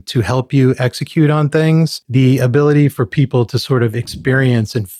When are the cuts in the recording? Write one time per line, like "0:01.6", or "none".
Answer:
0:02.0

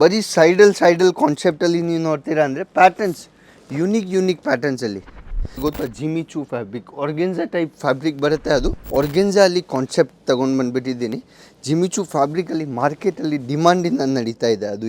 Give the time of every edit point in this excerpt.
0:05.5
0:08.8

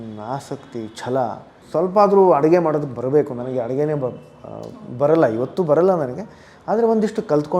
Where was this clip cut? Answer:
0:01.6

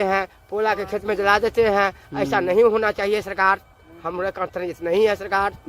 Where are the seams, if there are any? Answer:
none

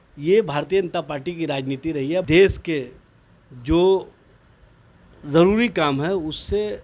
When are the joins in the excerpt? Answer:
0:02.2

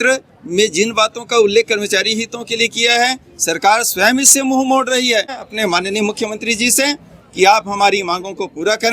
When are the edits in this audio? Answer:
0:05.5

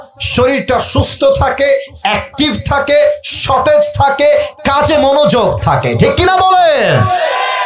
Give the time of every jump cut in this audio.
none

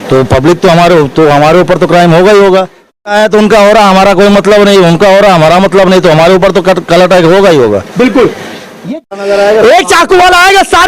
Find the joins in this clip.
0:03.0
0:08.9

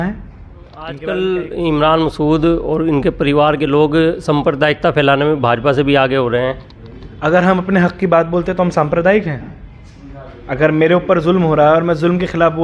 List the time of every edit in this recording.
0:01.0

